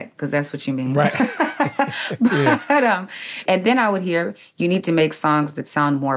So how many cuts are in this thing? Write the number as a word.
one